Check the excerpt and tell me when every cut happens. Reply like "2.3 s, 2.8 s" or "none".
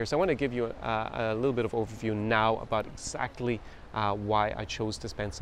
none